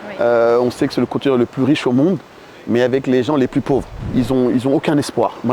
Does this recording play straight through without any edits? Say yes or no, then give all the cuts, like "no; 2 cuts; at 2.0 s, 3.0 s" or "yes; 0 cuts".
no; 1 cut; at 4.0 s